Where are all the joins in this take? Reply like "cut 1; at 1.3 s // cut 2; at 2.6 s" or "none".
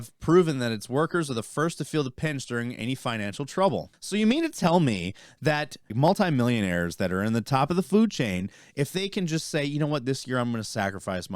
cut 1; at 4.0 s // cut 2; at 5.9 s